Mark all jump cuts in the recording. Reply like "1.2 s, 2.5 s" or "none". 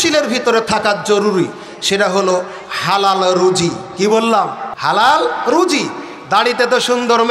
4.7 s